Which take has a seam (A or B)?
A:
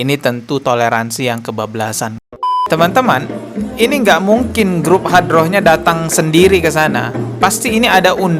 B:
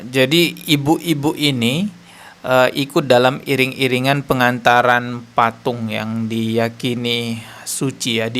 A